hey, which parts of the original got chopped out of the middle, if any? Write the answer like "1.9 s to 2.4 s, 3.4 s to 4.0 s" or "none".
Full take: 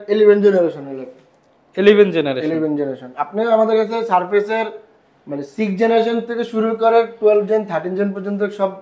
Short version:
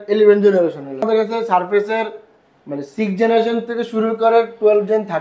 1.1 s to 3.7 s